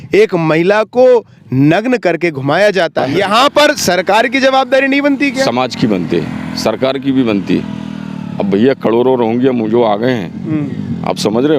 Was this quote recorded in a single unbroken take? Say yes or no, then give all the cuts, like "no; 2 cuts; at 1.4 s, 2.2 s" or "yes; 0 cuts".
no; 1 cut; at 3.1 s